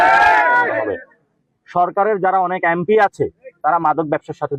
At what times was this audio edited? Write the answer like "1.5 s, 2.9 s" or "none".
none